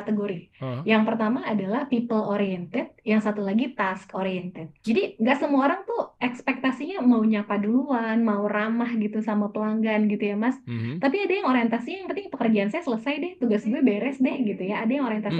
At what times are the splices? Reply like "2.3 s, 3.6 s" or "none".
4.8 s, 6.1 s